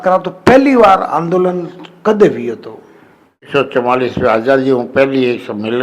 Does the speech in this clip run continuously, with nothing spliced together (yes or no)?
no